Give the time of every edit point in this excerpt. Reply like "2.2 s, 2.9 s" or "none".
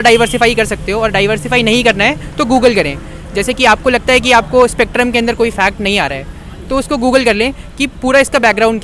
none